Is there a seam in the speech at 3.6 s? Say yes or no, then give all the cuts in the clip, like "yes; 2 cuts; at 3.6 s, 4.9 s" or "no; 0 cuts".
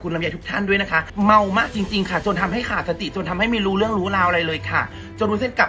no; 1 cut; at 1.1 s